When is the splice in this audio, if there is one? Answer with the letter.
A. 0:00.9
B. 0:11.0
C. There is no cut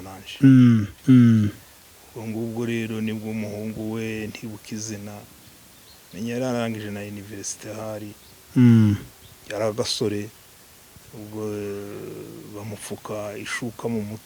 A